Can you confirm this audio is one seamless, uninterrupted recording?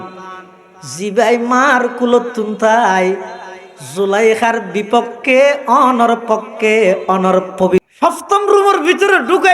no; 1 cut; at 7.8 s

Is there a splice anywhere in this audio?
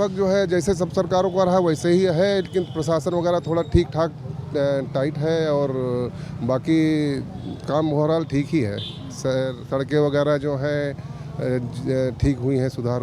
no; 0 cuts

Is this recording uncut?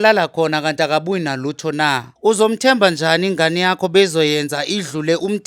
no; 1 cut; at 2.1 s

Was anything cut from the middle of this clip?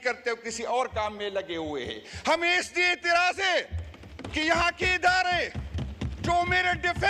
no; 0 cuts

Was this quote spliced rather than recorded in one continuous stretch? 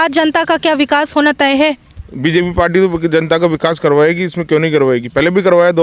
no; 0 cuts

